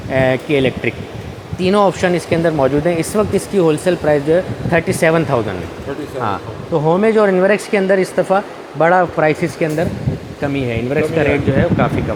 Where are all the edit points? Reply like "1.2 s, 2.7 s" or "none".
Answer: none